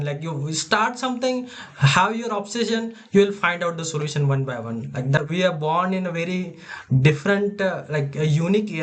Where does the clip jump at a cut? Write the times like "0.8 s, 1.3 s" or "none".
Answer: 5.2 s